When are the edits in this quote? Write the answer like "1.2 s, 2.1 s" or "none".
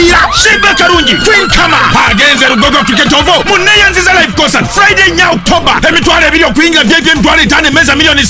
none